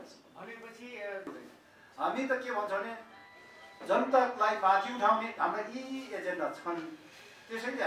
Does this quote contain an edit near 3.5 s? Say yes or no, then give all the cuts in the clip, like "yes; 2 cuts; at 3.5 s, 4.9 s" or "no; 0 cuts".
no; 1 cut; at 1.3 s